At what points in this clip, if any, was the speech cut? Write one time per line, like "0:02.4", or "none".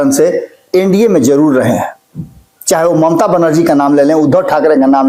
none